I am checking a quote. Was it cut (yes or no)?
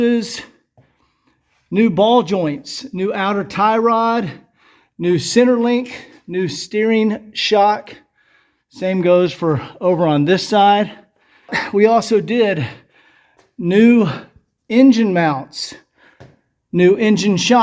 yes